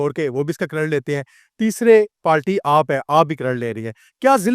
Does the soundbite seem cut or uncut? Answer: uncut